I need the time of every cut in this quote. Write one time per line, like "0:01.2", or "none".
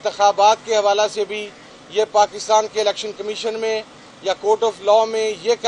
none